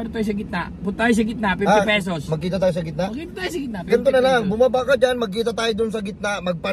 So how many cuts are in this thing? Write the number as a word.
zero